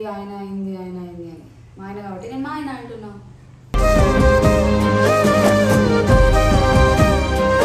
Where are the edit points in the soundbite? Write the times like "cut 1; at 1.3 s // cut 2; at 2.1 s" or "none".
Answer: none